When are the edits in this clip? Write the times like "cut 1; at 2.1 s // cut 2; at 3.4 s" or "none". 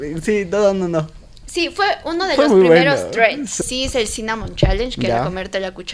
cut 1; at 3.6 s